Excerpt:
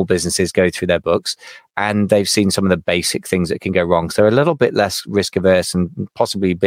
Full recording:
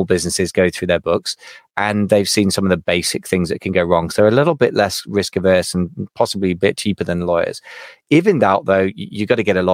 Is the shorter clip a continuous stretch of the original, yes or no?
yes